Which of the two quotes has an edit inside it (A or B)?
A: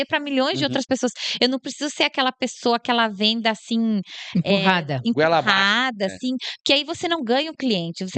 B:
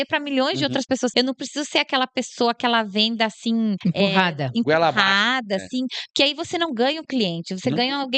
B